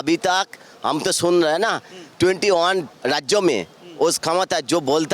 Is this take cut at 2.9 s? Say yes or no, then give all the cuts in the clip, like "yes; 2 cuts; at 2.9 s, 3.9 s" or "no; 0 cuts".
yes; 1 cut; at 2.9 s